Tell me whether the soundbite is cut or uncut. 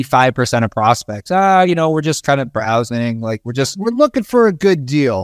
uncut